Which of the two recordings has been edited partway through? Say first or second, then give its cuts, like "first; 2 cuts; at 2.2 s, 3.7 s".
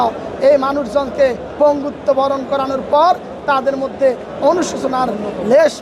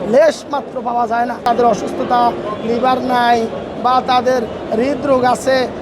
second; 1 cut; at 1.4 s